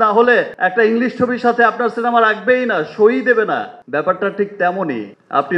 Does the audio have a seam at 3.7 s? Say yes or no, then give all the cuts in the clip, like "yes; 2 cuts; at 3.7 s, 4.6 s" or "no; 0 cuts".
no; 0 cuts